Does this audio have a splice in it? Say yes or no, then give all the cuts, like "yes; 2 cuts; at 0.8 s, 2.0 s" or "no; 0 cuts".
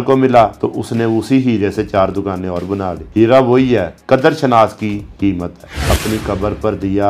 yes; 1 cut; at 5.7 s